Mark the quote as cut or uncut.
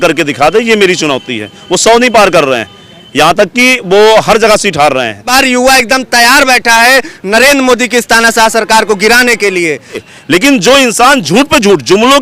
cut